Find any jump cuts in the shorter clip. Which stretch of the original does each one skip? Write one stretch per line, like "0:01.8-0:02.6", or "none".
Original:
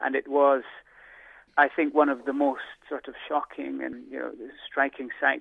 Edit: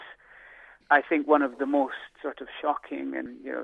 none

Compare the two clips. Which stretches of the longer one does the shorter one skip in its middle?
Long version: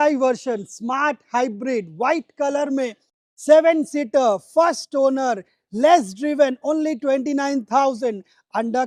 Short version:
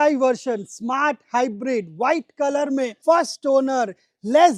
0:03.0-0:04.4

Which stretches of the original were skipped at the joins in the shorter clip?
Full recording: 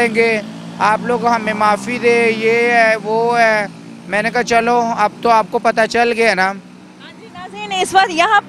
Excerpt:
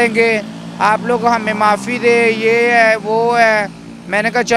none

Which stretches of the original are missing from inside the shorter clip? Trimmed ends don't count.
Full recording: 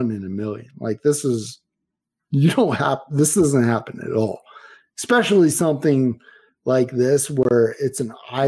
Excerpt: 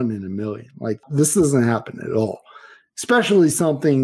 0:01.0-0:03.0

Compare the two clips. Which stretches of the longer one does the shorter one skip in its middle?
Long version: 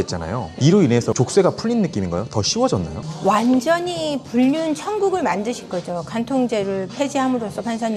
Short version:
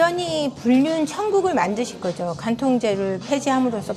none

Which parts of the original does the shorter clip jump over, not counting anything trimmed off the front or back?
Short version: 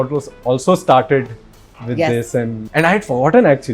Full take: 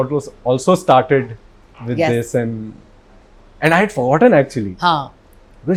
0:02.6-0:03.5

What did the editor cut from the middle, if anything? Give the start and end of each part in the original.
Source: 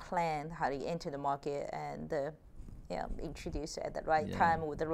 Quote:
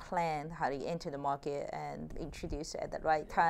0:02.1-0:03.1

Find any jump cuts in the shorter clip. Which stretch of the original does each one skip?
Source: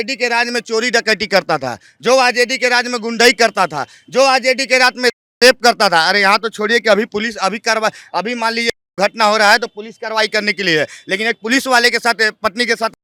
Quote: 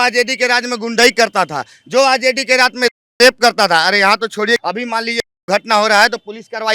0:06.8-0:08.1

